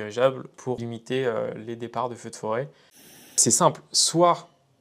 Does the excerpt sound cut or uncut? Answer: cut